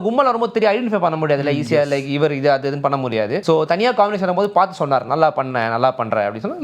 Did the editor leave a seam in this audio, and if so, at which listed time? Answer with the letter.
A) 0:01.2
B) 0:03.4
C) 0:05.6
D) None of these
B